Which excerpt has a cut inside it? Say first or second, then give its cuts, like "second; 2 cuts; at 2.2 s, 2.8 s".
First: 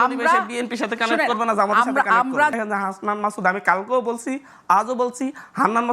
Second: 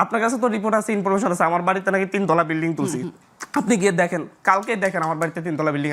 first; 1 cut; at 2.5 s